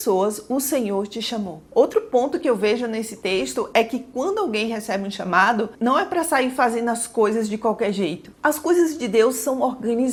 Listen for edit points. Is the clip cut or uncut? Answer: uncut